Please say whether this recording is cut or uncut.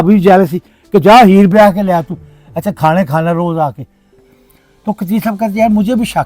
cut